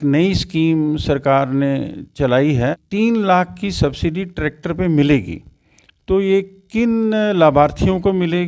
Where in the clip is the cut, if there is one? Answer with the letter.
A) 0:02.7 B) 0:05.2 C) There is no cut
A